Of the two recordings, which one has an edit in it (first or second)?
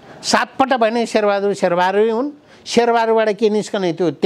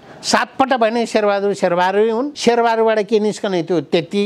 second